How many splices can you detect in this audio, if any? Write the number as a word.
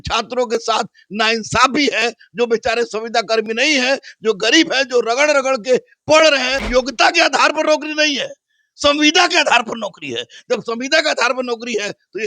one